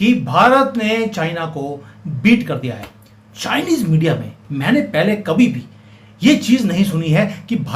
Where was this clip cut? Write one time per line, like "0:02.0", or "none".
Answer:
none